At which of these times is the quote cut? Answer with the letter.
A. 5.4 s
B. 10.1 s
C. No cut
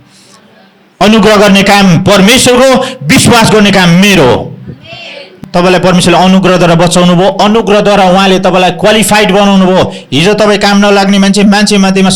A